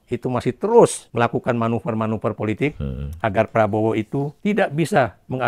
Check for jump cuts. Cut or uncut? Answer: cut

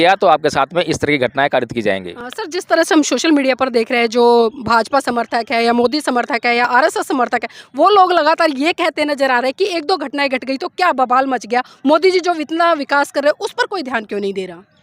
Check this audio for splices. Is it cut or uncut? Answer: uncut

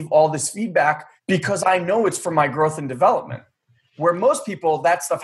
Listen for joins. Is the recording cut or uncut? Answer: cut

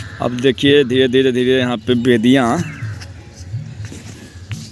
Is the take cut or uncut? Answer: uncut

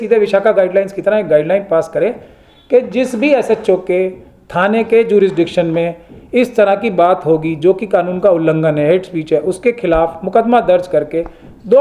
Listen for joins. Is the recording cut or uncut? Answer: uncut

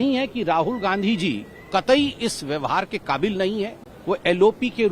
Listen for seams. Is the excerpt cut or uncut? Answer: cut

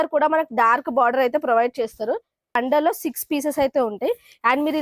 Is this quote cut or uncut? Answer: cut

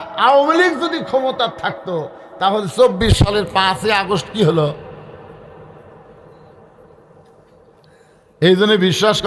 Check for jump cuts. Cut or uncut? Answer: uncut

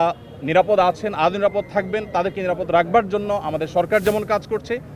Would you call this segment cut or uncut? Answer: uncut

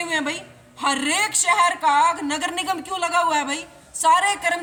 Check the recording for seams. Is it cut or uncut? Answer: uncut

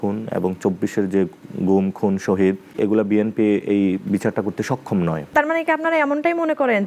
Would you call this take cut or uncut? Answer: cut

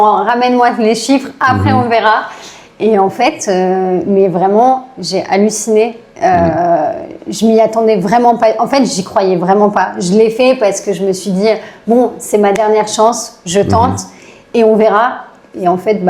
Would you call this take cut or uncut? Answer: uncut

